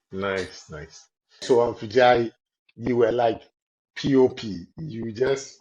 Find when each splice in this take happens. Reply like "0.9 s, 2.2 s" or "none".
1.4 s